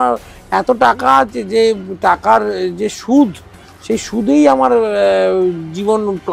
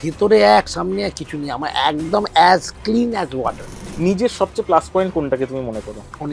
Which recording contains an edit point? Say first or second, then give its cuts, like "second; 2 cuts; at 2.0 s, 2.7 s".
second; 1 cut; at 3.9 s